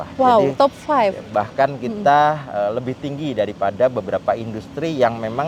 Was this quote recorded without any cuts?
yes; 0 cuts

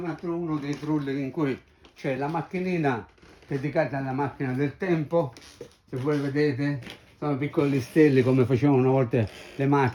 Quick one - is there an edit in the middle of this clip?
no; 0 cuts

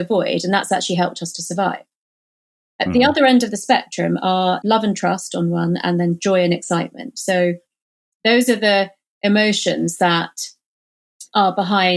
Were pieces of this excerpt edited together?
yes; 1 cut; at 4.6 s

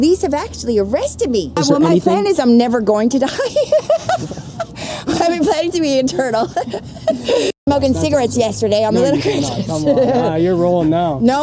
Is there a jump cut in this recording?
yes; 2 cuts; at 1.6 s, 7.7 s

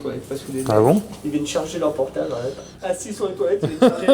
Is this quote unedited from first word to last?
no; 1 cut; at 2.7 s

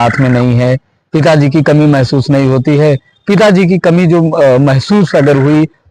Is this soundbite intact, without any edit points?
yes; 0 cuts

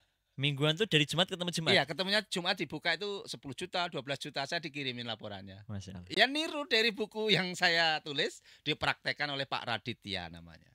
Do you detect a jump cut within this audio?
no; 0 cuts

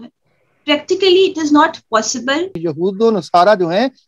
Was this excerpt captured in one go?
no; 1 cut; at 2.7 s

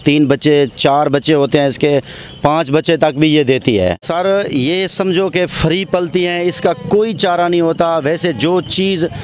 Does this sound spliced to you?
yes; 1 cut; at 4.1 s

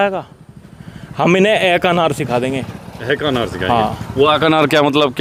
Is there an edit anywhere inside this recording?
no; 0 cuts

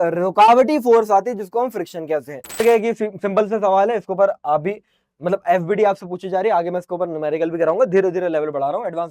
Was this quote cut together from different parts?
yes; 1 cut; at 2.6 s

